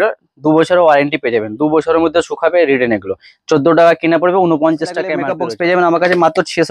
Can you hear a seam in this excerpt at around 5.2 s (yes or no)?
yes